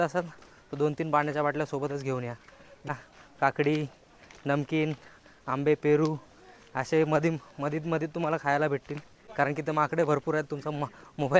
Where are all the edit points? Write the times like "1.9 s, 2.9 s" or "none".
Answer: 2.9 s, 9.2 s